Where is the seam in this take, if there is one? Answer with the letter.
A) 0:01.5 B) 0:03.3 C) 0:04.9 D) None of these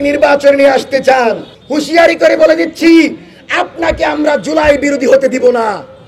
A